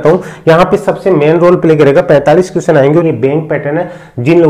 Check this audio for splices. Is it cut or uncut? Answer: cut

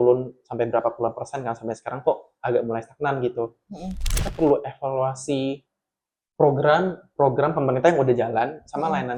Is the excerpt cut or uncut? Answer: cut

